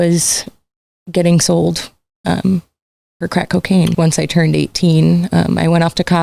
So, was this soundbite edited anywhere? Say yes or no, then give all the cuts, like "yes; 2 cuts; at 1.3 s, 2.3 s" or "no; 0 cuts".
yes; 1 cut; at 3.9 s